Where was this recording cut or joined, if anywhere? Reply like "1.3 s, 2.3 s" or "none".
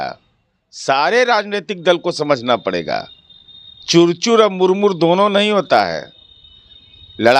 none